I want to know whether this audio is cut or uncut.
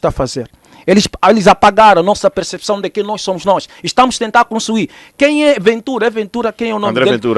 uncut